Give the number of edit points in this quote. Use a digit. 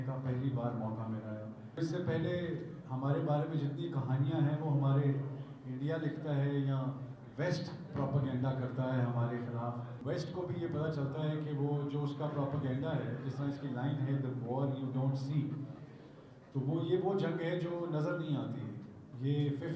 2